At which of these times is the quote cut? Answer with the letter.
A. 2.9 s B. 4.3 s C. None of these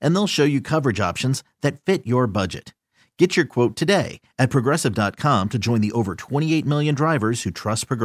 C